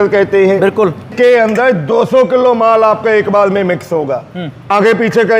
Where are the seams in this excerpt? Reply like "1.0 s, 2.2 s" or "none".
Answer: 1.1 s, 4.7 s